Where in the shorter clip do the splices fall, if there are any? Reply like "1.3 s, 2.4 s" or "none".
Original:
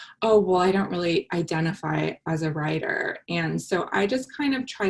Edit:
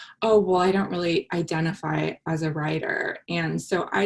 none

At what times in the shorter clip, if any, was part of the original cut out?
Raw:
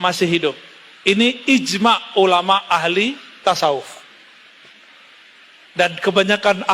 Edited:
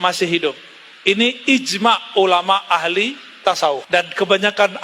3.8 s

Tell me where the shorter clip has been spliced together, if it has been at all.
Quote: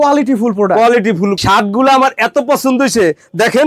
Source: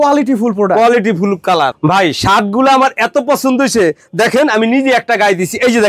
1.4 s

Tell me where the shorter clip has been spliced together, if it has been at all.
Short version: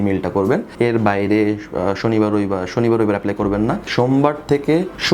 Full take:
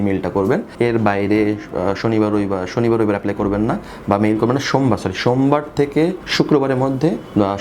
3.9 s

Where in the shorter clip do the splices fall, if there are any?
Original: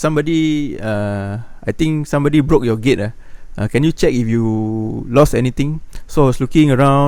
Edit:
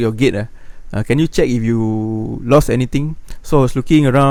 none

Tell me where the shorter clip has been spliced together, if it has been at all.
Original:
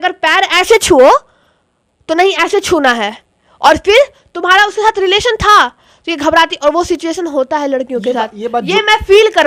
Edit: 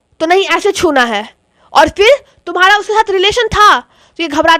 none

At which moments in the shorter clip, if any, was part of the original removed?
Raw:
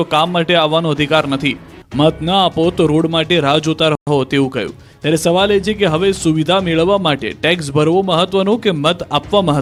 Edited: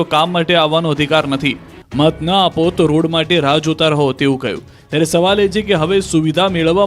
4.0 s

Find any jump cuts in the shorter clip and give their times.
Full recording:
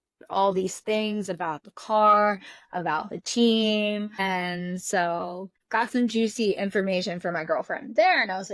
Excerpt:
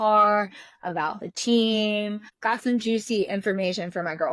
2.2 s

